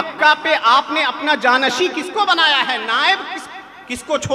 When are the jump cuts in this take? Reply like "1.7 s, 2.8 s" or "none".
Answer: none